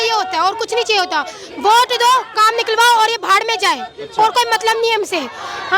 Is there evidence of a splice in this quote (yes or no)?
no